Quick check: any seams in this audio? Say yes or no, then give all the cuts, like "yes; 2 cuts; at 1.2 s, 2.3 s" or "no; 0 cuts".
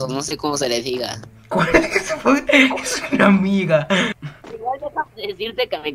yes; 1 cut; at 4.2 s